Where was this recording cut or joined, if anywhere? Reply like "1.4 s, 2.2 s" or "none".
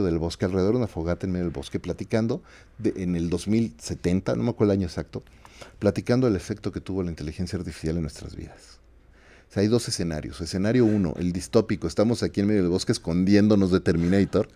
none